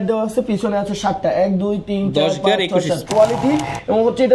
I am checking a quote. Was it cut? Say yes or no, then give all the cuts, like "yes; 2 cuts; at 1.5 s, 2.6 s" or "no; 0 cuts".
yes; 1 cut; at 3.0 s